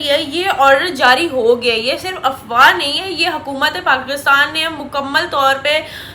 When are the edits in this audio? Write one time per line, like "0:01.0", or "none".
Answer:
none